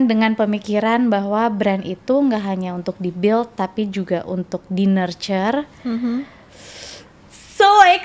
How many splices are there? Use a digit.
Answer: 0